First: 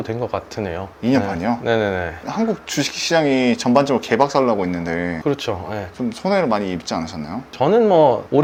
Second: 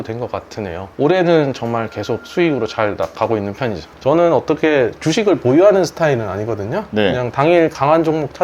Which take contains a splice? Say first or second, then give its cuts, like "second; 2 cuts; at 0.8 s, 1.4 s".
second; 2 cuts; at 0.9 s, 3.9 s